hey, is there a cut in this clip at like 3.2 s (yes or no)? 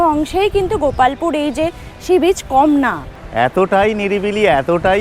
yes